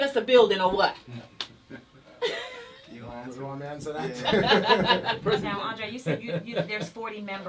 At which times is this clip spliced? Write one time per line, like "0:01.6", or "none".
0:05.5